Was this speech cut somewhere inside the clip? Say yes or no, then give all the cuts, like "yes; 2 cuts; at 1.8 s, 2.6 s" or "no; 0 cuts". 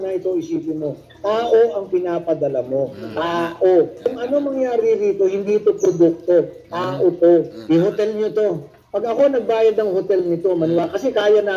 no; 0 cuts